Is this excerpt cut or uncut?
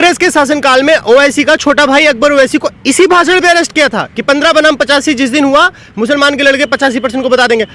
uncut